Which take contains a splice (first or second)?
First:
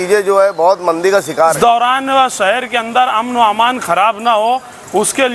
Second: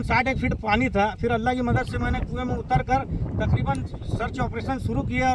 first